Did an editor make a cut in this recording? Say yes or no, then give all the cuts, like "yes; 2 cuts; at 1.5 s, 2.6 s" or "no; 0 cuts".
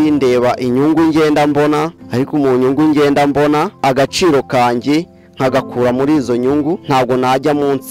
yes; 3 cuts; at 2.0 s, 3.8 s, 6.8 s